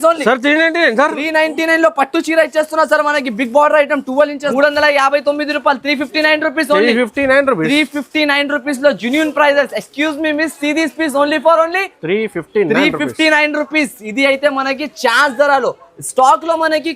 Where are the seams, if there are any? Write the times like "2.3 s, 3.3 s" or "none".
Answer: 4.5 s